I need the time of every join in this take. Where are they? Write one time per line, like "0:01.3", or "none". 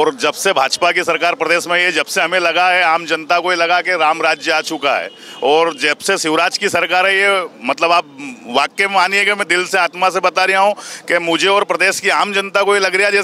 none